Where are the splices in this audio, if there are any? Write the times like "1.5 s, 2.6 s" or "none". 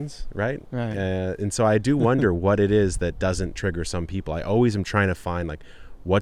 none